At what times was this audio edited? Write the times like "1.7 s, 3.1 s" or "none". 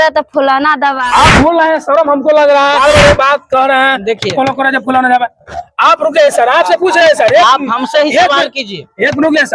1.0 s, 2.8 s

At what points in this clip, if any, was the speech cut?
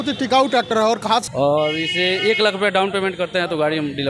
1.3 s

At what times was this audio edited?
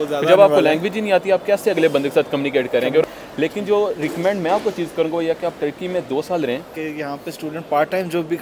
3.0 s, 6.7 s

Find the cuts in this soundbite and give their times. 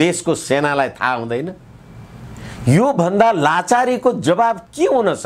none

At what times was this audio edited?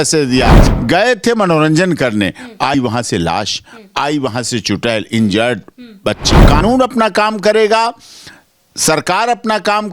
6.3 s

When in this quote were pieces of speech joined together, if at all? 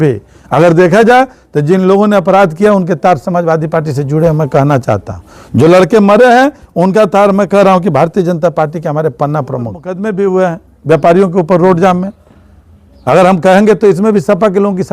9.9 s

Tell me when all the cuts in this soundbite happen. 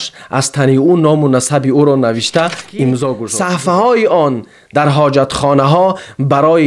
3.2 s

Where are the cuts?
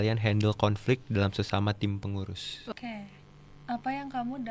2.7 s

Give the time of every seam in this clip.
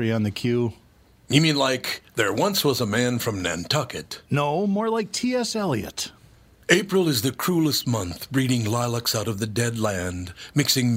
none

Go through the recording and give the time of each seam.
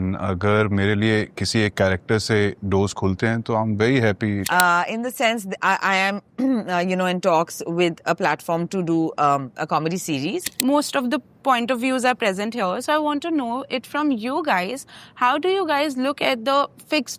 4.5 s, 10.5 s

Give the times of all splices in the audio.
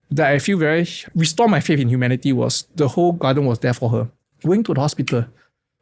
1.0 s

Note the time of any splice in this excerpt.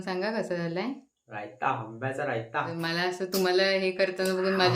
2.7 s

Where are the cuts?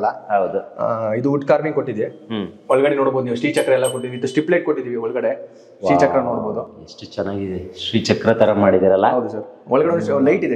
none

